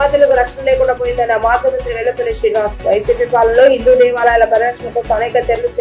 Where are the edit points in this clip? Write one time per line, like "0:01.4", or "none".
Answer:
none